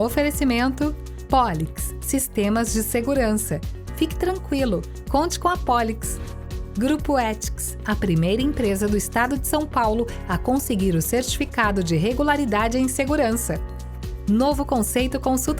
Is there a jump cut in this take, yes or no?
no